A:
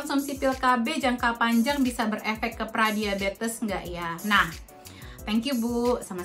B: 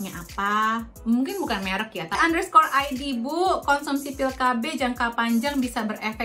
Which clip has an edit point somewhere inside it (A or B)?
B